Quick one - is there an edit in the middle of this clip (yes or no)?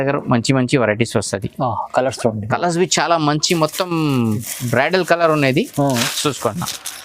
no